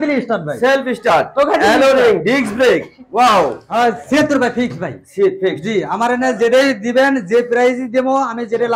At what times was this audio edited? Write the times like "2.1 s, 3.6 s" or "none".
3.6 s